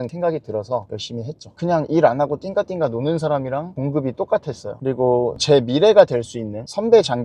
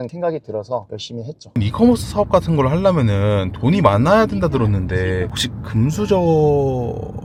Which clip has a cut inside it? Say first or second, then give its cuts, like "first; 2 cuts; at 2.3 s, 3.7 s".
first; 2 cuts; at 1.5 s, 4.8 s